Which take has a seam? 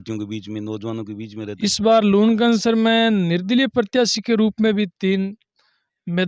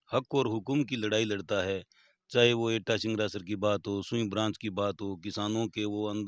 first; 1 cut; at 1.6 s

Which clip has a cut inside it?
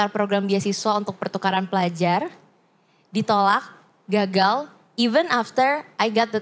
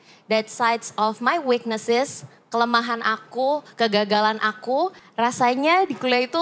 second; 1 cut; at 5.0 s

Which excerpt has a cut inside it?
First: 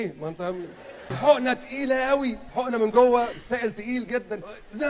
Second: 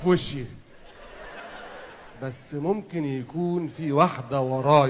first; 1 cut; at 1.1 s

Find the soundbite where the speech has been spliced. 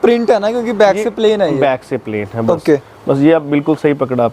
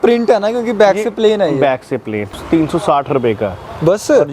second; 1 cut; at 2.4 s

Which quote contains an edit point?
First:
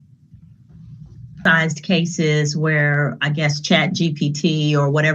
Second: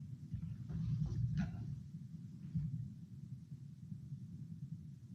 first; 1 cut; at 1.4 s

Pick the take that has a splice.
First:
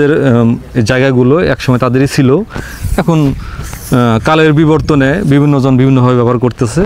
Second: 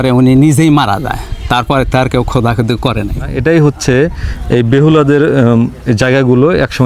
second; 1 cut; at 3.3 s

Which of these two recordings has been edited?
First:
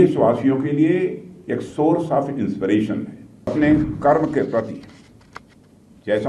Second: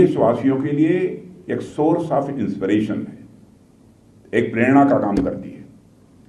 first; 1 cut; at 3.5 s

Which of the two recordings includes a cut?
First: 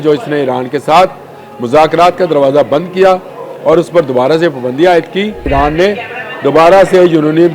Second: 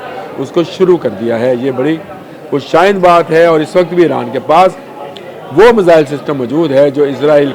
first; 1 cut; at 5.5 s

